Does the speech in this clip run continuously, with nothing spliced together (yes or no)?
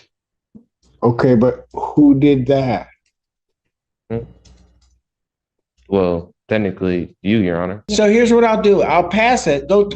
no